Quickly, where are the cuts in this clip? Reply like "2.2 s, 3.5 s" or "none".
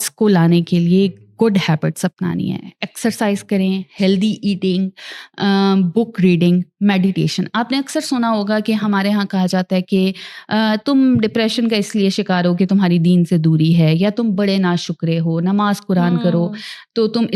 none